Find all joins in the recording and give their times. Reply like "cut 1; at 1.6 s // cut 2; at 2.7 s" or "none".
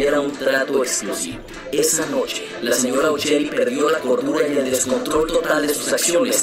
none